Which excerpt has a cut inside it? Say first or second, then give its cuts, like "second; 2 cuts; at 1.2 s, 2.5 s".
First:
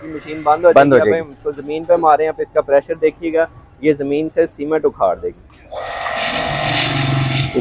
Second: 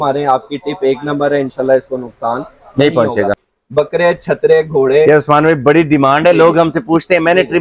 second; 1 cut; at 3.4 s